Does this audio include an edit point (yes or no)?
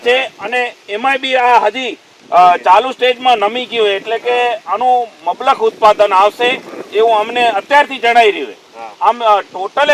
no